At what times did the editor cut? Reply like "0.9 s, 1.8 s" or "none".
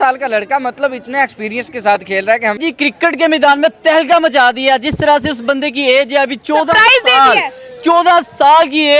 2.6 s